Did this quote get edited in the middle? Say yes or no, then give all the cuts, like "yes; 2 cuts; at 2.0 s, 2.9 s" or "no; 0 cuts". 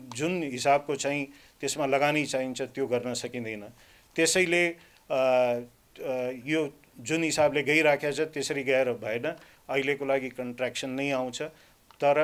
no; 0 cuts